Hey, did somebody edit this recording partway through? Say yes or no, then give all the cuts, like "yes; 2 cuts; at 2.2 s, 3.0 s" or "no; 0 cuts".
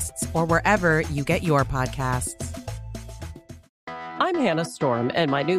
yes; 1 cut; at 3.7 s